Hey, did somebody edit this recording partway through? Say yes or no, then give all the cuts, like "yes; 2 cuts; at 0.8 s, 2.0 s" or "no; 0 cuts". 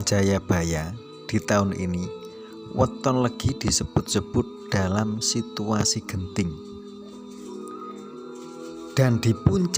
yes; 2 cuts; at 6.5 s, 8.8 s